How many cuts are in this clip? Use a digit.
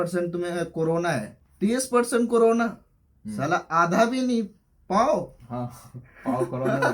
1